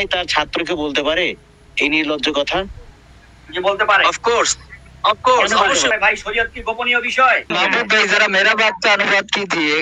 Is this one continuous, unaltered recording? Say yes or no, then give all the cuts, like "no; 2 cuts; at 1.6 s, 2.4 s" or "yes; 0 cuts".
no; 2 cuts; at 5.9 s, 7.5 s